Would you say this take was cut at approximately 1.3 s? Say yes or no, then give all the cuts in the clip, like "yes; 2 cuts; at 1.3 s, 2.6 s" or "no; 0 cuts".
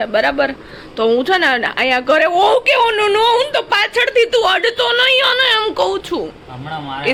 no; 0 cuts